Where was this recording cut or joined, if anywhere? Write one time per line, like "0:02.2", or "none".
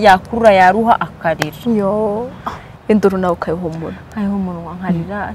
0:02.8